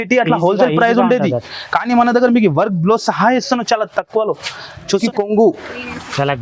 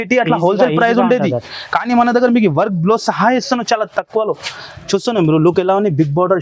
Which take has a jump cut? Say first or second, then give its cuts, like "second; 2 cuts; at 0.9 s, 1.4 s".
first; 1 cut; at 5.0 s